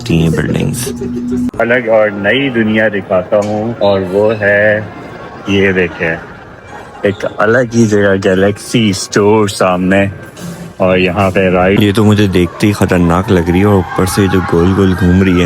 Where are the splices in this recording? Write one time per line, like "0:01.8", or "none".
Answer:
0:01.6
0:11.8